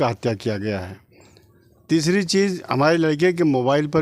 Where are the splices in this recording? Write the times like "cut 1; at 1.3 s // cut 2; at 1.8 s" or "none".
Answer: none